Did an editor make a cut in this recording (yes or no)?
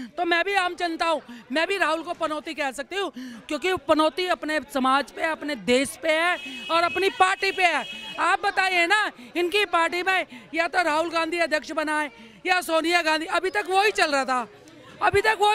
no